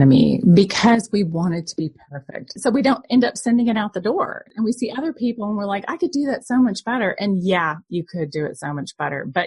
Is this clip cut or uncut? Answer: cut